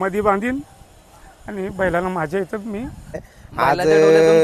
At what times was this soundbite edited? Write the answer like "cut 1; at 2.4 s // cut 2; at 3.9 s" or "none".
cut 1; at 3.3 s